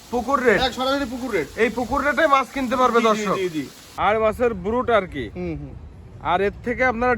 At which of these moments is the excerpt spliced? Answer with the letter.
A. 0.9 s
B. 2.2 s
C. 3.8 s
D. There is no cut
C